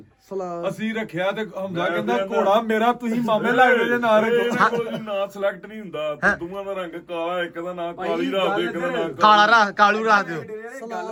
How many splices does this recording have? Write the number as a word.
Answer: zero